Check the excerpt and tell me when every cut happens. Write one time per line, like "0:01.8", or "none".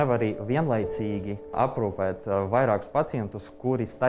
0:01.5